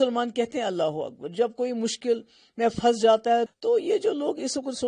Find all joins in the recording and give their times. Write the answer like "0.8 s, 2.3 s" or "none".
3.5 s